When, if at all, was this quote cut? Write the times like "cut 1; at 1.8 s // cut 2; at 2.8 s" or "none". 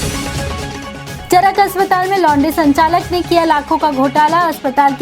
cut 1; at 1.1 s